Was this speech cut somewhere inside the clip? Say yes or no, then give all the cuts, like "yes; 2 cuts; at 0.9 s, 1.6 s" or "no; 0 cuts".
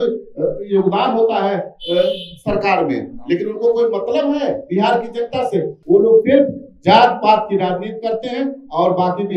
yes; 1 cut; at 5.7 s